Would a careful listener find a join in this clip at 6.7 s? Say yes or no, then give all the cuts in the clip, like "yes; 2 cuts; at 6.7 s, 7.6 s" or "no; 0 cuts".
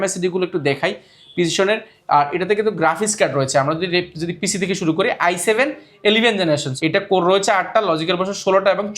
yes; 1 cut; at 6.7 s